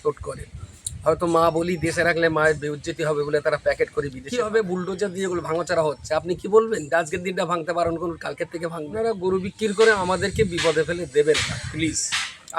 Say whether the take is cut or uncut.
cut